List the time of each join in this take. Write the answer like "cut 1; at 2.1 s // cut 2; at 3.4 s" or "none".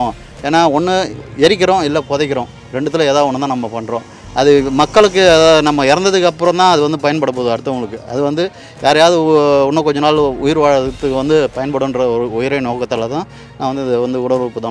none